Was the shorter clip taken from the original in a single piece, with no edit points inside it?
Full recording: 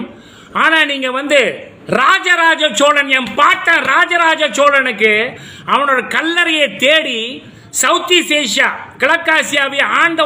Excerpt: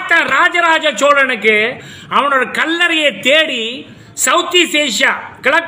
yes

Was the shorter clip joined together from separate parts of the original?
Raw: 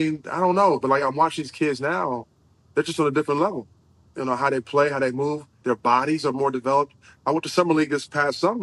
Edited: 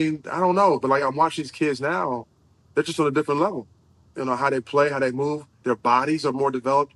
no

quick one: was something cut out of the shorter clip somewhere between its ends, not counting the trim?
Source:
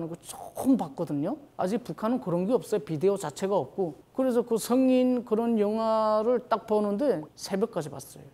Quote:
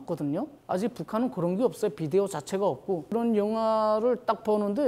yes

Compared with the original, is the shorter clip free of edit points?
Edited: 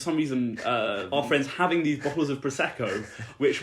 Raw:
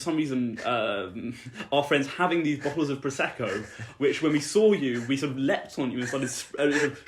no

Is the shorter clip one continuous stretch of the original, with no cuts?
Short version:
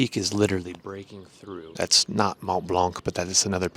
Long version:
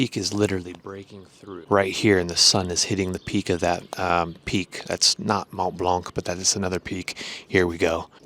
no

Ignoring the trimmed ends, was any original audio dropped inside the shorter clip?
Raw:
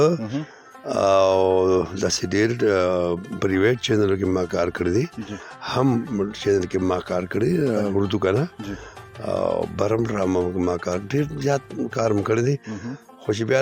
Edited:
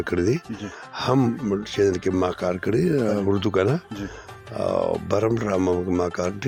no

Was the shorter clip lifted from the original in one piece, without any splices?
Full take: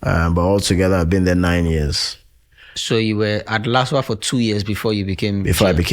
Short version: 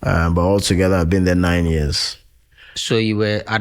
yes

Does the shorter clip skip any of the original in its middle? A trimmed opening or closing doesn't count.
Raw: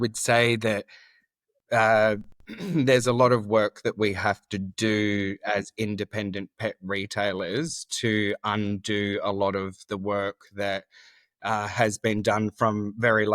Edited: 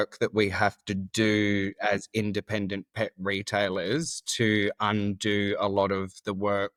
no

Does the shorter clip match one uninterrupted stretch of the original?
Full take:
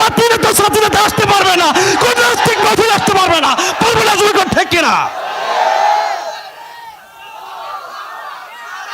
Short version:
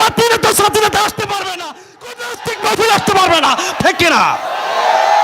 no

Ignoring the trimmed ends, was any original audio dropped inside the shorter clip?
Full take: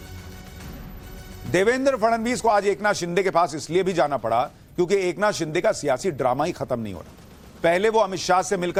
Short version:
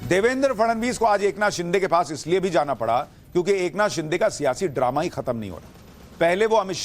no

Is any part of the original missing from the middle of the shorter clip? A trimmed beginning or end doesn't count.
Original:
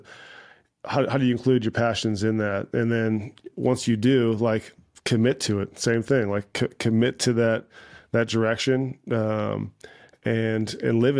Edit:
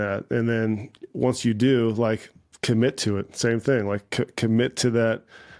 no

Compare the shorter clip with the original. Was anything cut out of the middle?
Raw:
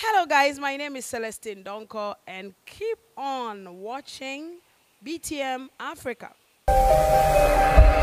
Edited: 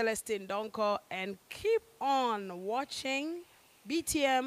no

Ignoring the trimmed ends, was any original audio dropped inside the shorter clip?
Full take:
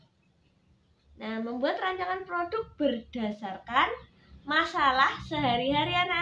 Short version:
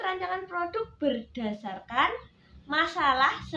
no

